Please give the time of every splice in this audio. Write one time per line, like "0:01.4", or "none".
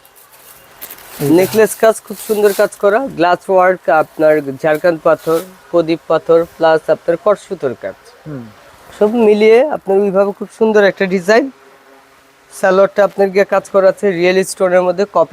none